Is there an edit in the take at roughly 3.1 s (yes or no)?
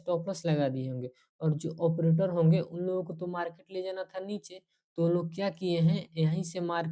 no